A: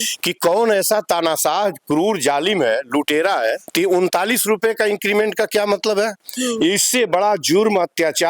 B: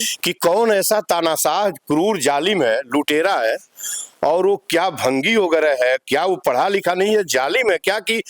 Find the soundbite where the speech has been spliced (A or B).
A